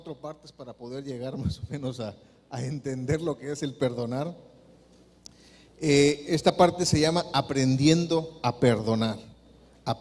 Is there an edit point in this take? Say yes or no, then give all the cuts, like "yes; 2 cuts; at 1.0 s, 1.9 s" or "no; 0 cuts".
yes; 1 cut; at 7.4 s